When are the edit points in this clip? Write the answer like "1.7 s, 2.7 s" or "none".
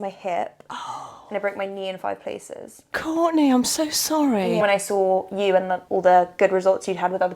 2.9 s, 4.6 s, 5.8 s